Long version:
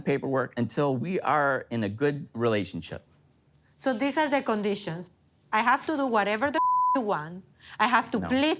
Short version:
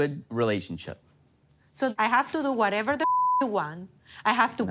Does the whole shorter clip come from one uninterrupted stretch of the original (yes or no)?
no